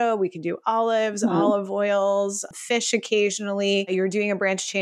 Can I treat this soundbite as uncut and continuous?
no; 2 cuts; at 2.5 s, 3.9 s

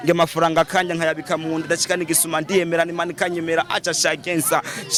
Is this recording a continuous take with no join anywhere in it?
yes; 0 cuts

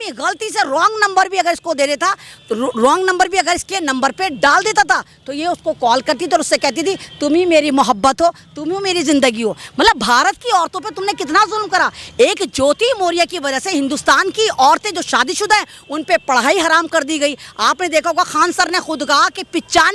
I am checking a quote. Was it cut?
no; 0 cuts

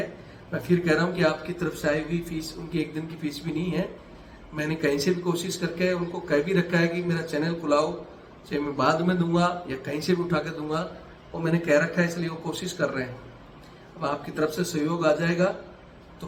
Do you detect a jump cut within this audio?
no; 0 cuts

